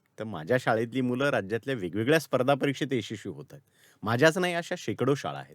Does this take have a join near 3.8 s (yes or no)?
no